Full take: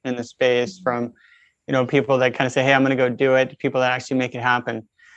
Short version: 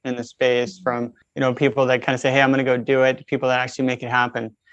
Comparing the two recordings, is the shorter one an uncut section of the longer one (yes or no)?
no